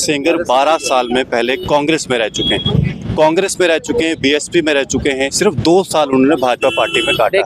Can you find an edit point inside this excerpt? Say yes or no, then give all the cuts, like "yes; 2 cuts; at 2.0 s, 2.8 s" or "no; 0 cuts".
no; 0 cuts